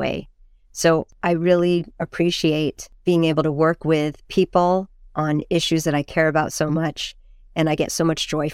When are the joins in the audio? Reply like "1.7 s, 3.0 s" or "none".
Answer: 1.1 s, 2.9 s